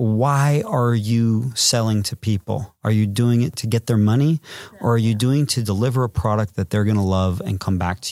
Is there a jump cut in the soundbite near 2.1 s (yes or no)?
no